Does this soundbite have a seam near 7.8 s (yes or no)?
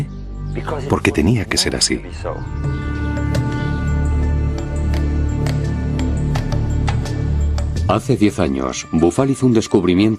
yes